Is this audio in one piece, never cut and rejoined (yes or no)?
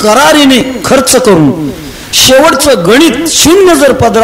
yes